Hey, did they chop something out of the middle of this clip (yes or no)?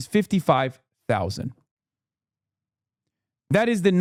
no